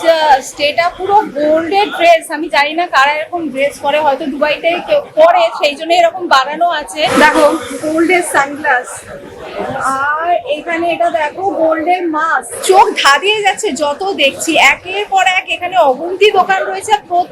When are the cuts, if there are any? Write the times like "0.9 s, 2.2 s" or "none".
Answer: 7.1 s, 12.6 s